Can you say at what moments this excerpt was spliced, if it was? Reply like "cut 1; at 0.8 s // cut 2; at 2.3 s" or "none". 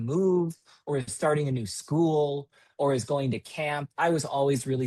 none